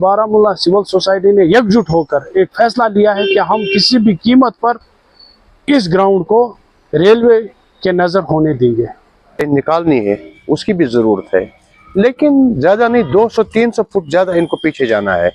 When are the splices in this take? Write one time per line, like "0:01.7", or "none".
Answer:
0:09.4